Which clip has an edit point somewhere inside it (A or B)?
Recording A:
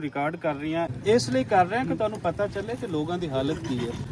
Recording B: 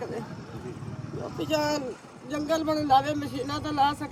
A